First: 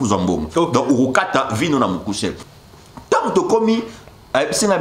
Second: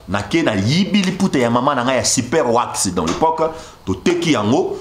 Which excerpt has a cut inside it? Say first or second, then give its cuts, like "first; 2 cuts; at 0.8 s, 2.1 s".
first; 1 cut; at 2.5 s